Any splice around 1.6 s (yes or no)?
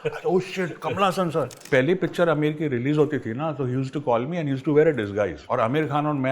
yes